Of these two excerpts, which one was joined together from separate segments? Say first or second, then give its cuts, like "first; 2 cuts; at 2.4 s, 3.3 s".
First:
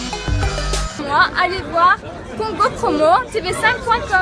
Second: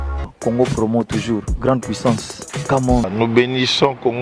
first; 1 cut; at 1.0 s